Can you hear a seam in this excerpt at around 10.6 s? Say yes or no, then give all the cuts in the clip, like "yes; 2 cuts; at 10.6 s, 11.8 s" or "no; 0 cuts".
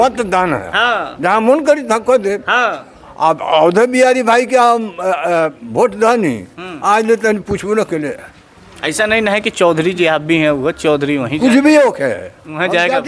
no; 0 cuts